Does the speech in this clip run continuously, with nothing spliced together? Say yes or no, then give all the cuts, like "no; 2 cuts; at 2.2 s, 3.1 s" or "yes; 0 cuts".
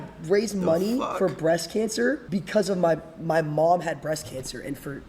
no; 2 cuts; at 1.1 s, 2.2 s